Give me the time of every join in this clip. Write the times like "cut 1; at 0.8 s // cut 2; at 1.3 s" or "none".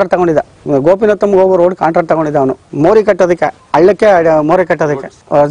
cut 1; at 2.6 s